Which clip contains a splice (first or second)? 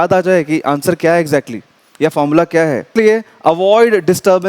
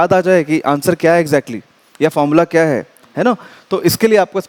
first